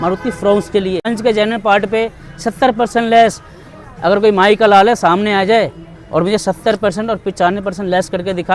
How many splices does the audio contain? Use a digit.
1